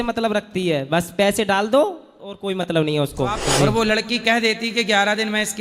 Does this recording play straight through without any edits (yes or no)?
no